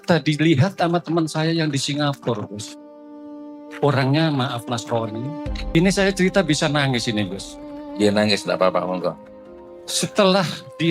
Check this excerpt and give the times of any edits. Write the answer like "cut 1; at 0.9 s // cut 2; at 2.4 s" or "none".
cut 1; at 5.8 s